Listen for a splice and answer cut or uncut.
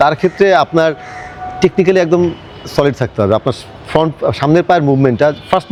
uncut